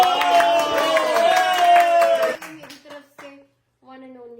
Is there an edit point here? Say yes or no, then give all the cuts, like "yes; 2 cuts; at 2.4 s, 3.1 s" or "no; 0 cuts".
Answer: yes; 1 cut; at 2.5 s